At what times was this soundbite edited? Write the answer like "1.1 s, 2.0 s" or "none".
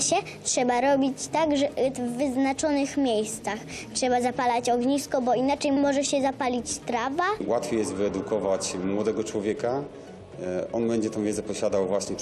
5.8 s, 7.4 s